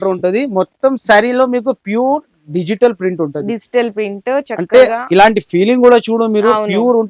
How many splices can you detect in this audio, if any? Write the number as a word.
zero